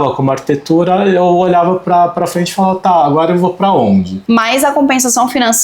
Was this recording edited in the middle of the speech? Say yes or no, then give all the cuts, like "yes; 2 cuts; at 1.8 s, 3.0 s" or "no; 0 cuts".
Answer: yes; 1 cut; at 4.2 s